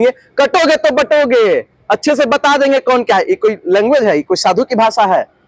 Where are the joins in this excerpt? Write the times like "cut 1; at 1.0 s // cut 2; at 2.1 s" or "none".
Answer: none